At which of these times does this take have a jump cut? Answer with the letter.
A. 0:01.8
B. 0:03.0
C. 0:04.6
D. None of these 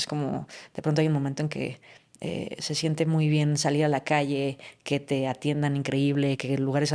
D